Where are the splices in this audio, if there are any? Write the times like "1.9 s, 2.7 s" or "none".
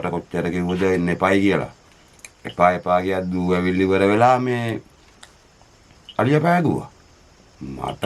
none

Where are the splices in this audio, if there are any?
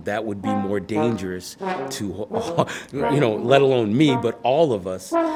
none

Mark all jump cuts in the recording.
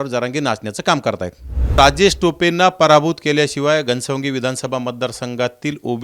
1.7 s

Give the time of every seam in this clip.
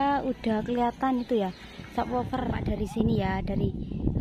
2.8 s

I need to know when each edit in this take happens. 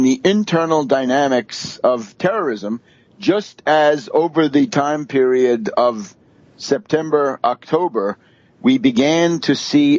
none

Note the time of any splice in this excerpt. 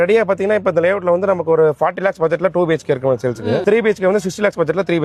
3.6 s

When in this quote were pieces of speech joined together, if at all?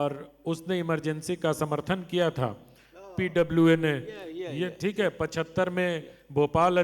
none

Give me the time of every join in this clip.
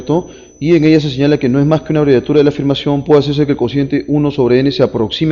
2.7 s

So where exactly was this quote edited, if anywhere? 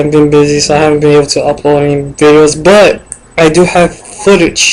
none

